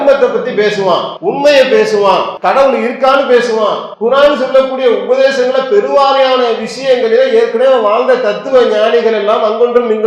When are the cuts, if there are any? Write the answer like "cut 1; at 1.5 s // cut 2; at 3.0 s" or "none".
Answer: cut 1; at 1.1 s // cut 2; at 2.3 s // cut 3; at 3.9 s